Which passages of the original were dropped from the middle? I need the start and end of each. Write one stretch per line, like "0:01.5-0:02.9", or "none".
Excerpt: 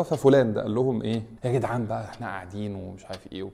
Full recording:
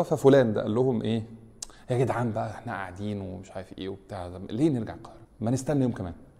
0:01.3-0:01.8